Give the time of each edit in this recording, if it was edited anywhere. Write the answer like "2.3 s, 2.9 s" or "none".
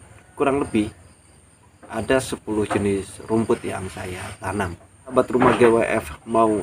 5.1 s

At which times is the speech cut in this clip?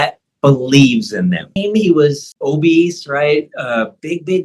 1.6 s, 2.3 s

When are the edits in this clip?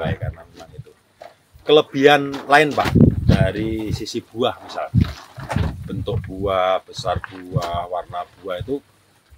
none

